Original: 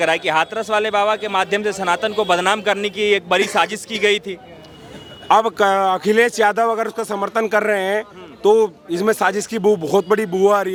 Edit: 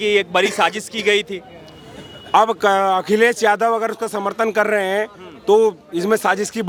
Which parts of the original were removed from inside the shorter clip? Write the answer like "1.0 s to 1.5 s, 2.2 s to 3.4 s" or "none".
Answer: none